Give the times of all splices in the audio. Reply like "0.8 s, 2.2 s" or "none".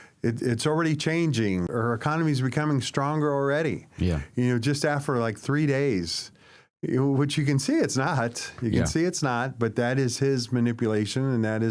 1.7 s